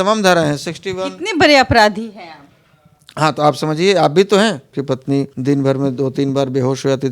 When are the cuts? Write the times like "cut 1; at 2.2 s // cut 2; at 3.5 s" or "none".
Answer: cut 1; at 4.7 s